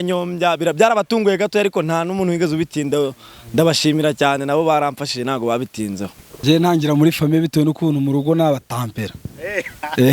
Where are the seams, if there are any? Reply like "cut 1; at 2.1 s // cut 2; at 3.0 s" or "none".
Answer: cut 1; at 6.3 s